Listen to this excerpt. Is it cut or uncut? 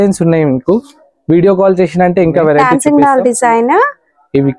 cut